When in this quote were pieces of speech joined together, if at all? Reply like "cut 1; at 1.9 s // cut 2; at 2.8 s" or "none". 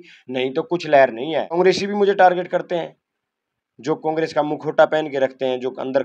cut 1; at 1.5 s